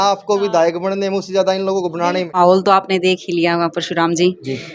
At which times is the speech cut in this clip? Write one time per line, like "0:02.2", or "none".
0:02.3